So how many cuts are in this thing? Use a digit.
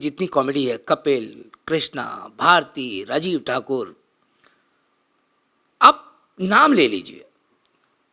0